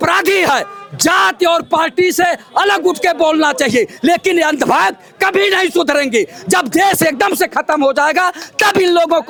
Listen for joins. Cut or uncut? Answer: uncut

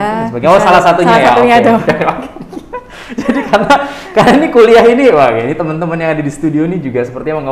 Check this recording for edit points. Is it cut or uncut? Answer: uncut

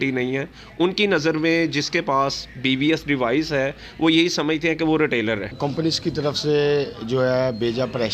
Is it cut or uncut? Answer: cut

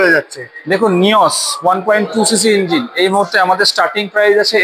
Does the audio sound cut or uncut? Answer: uncut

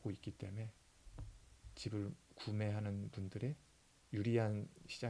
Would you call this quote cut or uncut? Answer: uncut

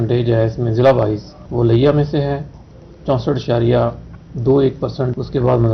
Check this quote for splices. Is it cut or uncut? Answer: uncut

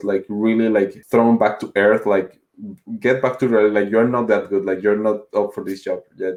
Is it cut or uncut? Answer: uncut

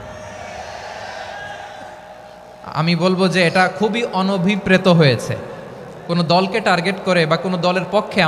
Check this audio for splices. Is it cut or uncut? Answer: uncut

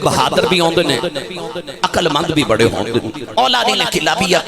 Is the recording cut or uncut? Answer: cut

